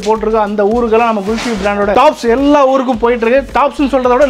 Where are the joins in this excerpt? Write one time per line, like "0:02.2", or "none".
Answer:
none